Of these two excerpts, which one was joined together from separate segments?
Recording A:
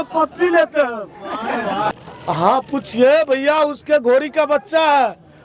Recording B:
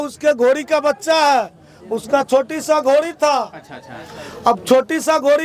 A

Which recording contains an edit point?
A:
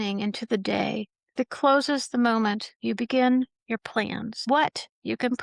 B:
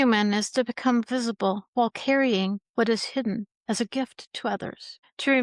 A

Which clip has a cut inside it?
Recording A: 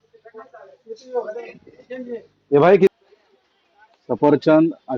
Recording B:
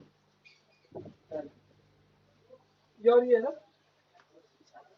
A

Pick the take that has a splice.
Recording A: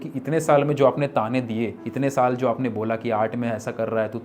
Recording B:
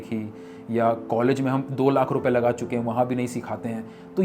A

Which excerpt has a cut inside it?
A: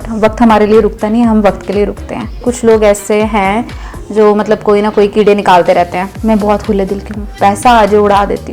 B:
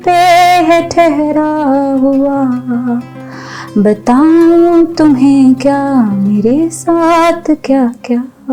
A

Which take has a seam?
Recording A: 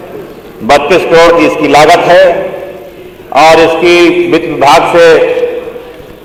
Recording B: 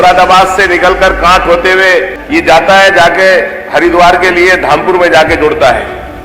B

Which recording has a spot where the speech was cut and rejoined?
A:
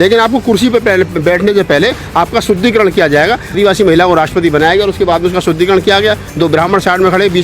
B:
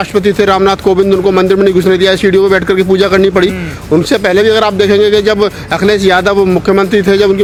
A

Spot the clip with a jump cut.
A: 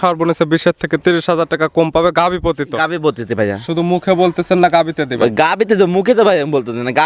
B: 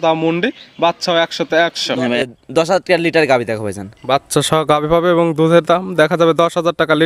B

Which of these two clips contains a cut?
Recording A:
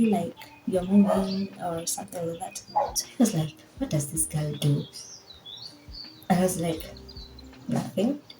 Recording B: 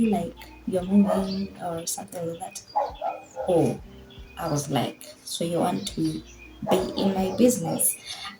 A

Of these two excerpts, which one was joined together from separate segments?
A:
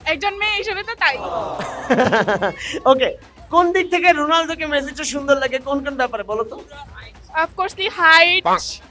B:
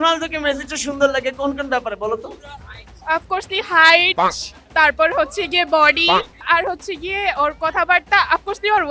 B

